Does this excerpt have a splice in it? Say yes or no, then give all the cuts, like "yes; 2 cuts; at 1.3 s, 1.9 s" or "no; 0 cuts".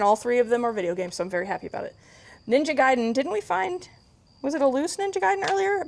no; 0 cuts